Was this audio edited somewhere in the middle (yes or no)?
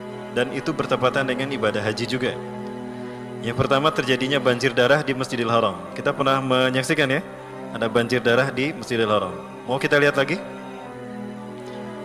no